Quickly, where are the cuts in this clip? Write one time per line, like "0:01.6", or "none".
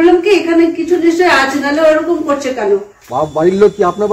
0:03.0